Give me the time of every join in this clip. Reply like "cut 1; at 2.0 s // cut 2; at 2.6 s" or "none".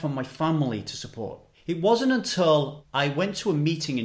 cut 1; at 1.5 s // cut 2; at 2.8 s